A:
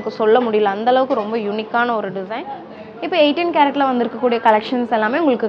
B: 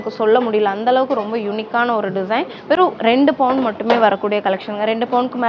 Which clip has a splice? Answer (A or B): A